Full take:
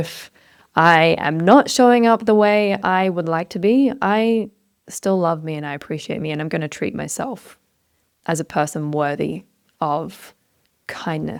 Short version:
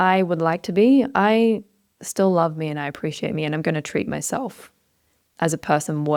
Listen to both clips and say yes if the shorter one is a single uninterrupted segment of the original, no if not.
yes